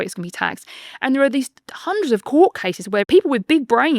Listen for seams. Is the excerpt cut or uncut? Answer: cut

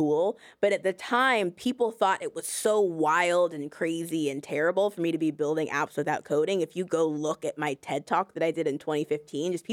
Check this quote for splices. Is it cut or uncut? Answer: uncut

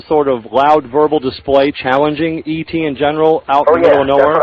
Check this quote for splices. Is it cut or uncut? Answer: uncut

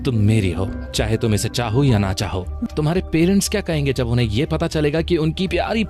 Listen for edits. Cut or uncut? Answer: cut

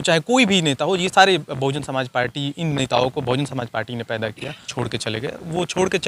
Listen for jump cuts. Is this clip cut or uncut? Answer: cut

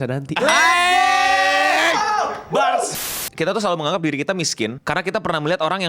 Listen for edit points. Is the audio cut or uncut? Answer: cut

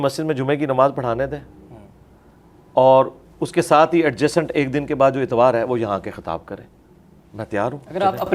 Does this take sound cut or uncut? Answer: uncut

